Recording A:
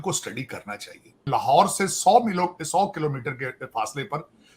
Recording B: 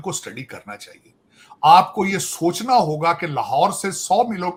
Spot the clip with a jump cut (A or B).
A